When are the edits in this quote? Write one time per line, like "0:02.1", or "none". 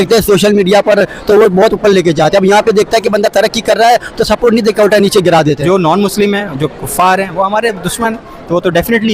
0:05.6